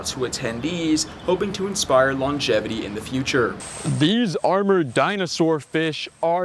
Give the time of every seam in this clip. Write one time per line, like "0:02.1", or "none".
0:03.7